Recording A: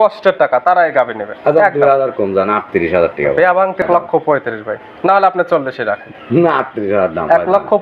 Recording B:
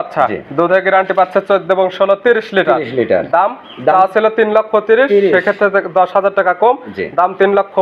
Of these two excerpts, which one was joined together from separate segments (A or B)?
A